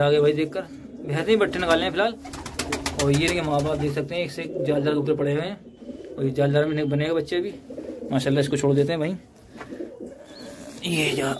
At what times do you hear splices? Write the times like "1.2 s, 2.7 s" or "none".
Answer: none